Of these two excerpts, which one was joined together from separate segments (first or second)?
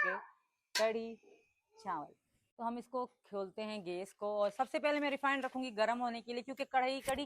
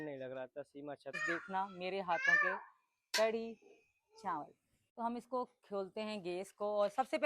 second